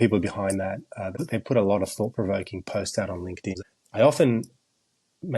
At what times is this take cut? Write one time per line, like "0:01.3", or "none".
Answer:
0:01.1
0:03.5